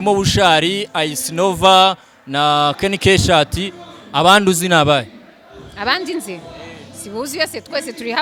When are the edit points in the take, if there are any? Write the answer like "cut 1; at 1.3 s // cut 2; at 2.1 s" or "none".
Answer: none